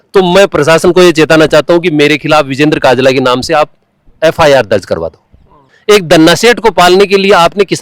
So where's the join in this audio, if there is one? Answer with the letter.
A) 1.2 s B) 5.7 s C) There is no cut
B